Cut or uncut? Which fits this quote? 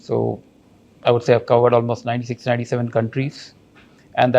uncut